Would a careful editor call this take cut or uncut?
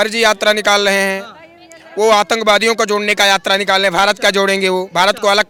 uncut